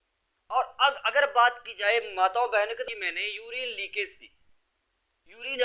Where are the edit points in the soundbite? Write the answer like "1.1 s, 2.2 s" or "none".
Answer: 2.9 s